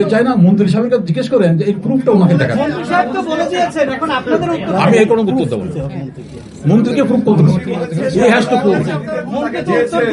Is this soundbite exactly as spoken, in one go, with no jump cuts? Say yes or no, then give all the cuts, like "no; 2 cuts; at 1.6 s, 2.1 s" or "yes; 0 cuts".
yes; 0 cuts